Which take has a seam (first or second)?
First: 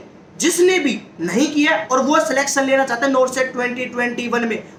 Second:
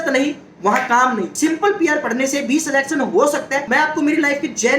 second